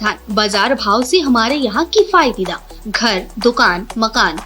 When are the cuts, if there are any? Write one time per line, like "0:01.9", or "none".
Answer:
none